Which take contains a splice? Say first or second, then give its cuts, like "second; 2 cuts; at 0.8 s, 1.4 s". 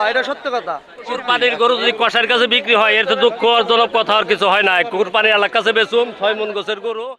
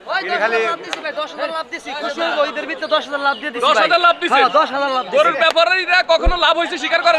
first; 1 cut; at 1.1 s